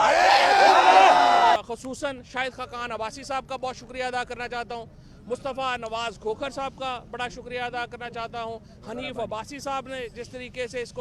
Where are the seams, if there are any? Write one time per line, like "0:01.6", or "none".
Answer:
0:01.6